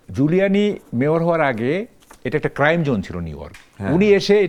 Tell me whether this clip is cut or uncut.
uncut